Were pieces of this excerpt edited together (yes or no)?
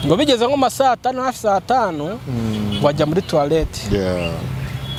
no